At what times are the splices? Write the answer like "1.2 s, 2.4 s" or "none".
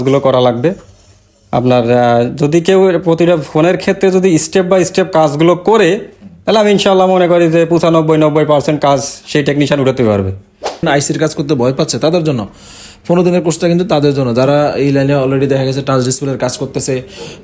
10.8 s